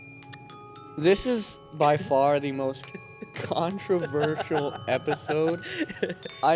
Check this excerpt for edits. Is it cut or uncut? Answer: uncut